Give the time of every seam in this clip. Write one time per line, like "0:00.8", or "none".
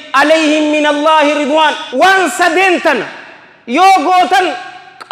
0:01.8